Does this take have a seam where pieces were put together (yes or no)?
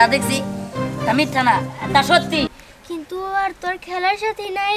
yes